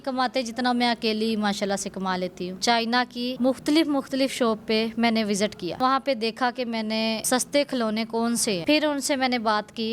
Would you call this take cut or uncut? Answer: cut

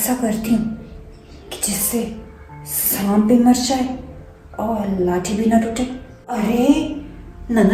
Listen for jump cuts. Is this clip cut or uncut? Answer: cut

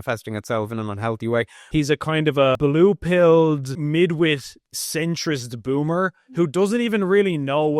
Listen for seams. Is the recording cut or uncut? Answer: cut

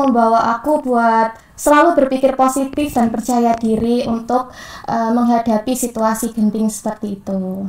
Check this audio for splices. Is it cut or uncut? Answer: uncut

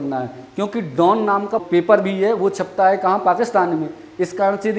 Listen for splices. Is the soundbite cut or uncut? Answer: cut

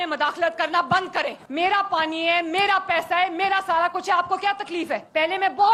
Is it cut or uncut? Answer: uncut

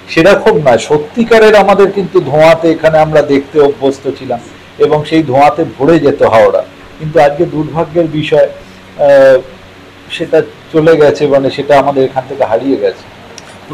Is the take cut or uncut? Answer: uncut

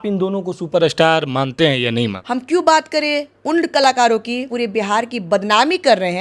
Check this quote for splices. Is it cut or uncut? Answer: cut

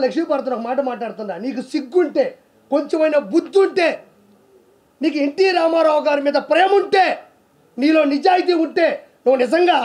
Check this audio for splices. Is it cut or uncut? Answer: uncut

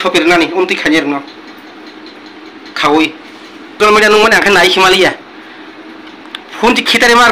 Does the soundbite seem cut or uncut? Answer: cut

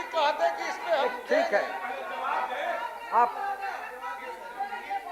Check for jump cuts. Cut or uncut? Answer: uncut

